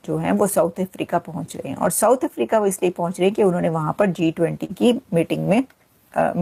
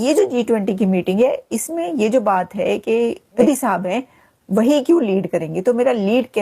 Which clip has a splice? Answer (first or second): second